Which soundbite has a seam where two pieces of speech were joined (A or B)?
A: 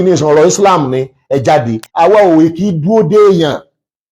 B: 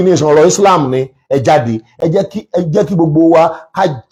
A